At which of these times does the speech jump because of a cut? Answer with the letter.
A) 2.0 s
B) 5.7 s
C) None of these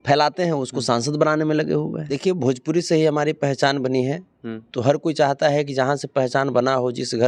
A